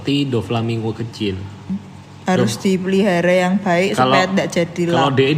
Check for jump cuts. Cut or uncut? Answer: cut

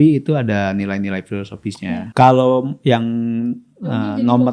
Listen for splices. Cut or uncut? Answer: cut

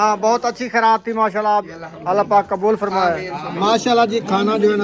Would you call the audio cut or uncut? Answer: cut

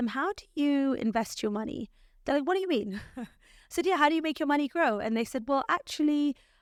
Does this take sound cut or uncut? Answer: uncut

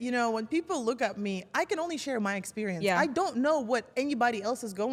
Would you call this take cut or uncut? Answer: uncut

